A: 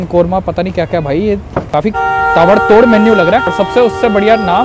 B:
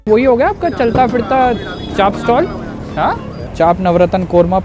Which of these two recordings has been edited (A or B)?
A